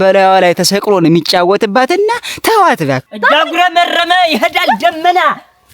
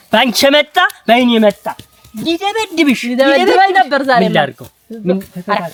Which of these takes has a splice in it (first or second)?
first